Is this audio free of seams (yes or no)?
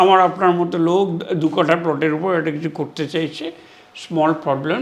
yes